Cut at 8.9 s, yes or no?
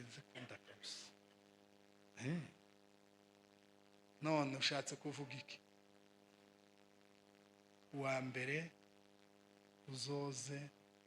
no